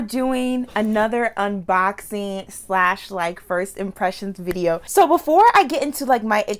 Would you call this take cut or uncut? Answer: cut